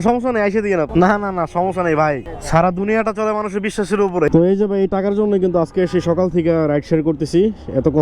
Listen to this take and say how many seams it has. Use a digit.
2